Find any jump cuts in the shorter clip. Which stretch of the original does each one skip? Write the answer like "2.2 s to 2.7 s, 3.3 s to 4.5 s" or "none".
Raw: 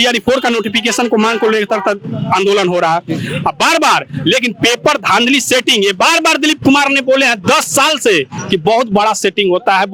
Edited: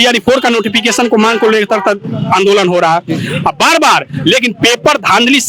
none